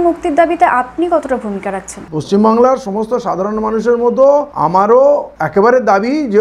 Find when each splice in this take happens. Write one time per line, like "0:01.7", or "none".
none